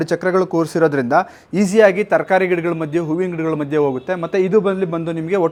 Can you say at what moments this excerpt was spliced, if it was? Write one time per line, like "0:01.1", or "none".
none